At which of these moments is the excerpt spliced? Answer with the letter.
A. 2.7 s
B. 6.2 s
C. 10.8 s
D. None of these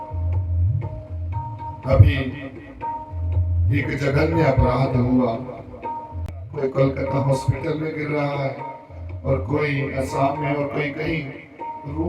B